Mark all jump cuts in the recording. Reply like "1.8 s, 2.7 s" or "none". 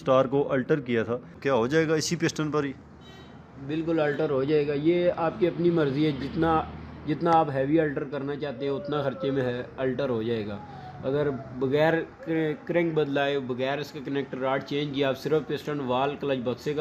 1.3 s